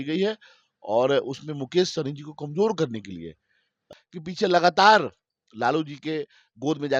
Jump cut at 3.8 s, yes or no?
yes